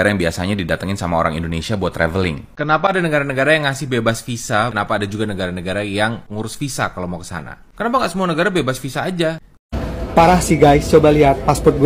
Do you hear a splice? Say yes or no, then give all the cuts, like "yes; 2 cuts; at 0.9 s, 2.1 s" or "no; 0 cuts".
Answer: yes; 2 cuts; at 2.4 s, 9.5 s